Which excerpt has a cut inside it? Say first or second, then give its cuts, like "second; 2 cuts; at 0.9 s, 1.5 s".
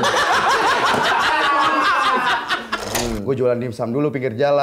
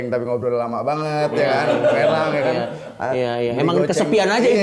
first; 1 cut; at 2.9 s